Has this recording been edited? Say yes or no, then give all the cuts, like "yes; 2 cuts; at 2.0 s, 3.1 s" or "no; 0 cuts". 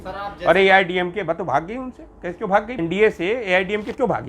yes; 1 cut; at 2.8 s